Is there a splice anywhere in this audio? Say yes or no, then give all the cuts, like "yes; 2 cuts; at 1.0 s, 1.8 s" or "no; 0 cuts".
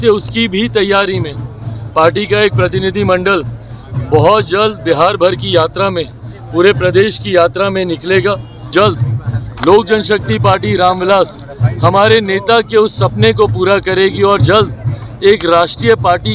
yes; 1 cut; at 8.7 s